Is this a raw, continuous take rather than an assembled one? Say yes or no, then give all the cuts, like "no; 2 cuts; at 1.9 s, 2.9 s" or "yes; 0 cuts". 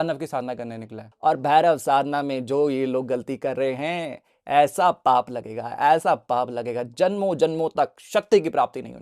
no; 1 cut; at 1.1 s